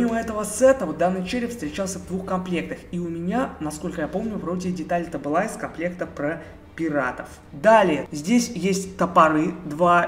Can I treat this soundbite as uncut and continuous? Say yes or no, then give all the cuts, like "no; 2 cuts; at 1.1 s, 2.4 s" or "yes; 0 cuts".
yes; 0 cuts